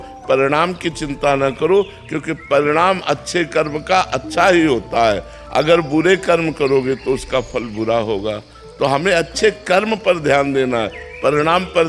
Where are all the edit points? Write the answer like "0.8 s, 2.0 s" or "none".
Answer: none